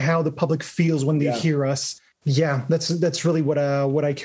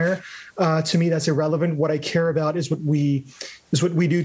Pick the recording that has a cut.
first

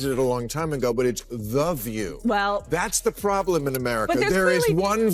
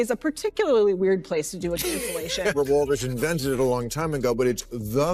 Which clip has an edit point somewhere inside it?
second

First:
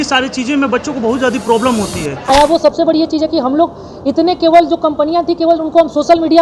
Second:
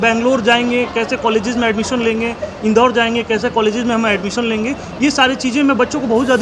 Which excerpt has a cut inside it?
first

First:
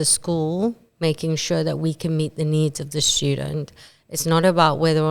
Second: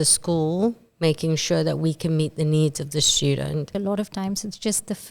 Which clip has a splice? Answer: second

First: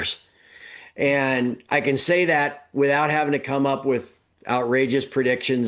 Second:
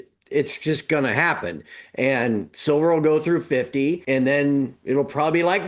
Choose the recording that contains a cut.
second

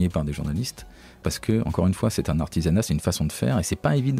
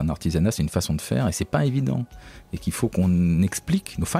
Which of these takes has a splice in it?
first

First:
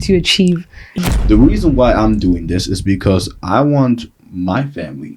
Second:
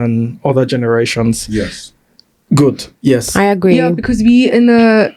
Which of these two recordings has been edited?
first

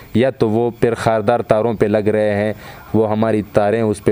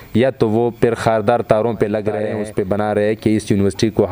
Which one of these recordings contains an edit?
second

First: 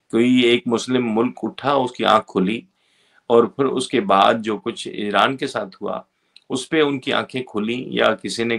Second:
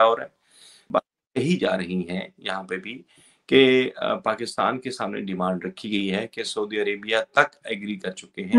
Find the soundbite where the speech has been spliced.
second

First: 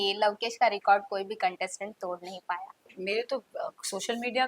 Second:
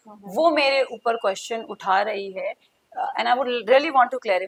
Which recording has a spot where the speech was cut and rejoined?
first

